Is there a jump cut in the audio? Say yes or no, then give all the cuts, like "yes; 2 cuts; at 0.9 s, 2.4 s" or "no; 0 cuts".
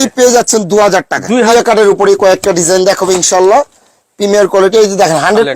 yes; 1 cut; at 1.5 s